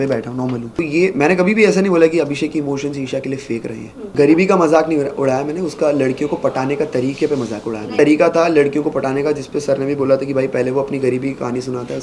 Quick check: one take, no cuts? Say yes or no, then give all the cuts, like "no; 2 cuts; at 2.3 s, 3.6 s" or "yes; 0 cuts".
no; 3 cuts; at 0.8 s, 4.1 s, 7.9 s